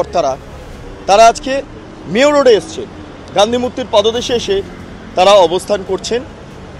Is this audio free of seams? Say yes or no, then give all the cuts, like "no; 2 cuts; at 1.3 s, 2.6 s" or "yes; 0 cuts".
yes; 0 cuts